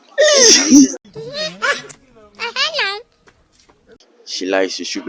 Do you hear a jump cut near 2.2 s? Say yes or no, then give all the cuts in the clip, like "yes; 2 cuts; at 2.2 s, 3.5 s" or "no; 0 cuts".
no; 2 cuts; at 1.0 s, 3.8 s